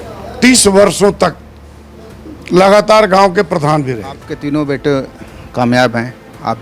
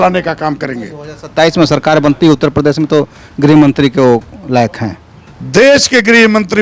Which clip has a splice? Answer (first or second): first